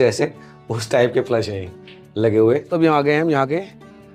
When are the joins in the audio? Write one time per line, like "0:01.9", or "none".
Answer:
0:02.7